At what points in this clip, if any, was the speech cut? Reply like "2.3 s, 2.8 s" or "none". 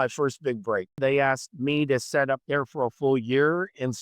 1.0 s